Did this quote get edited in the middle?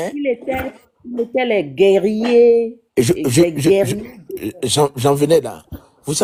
no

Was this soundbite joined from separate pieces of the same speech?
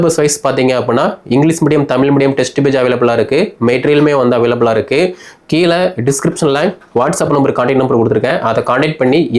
no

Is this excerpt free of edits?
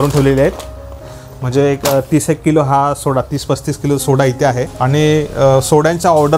no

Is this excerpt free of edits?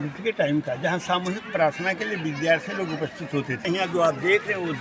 no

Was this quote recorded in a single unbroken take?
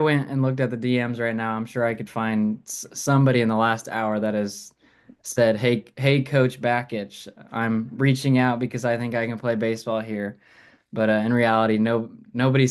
yes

